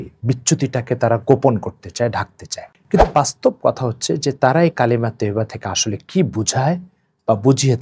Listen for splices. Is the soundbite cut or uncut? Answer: uncut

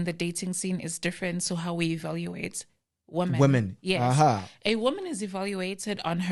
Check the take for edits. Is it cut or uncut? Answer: uncut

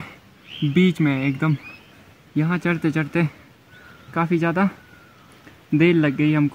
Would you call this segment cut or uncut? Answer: uncut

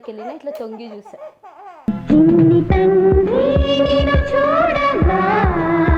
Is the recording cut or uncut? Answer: uncut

